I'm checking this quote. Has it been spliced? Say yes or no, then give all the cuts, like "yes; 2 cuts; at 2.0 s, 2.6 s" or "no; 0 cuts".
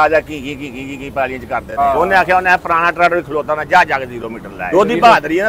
yes; 2 cuts; at 1.8 s, 4.7 s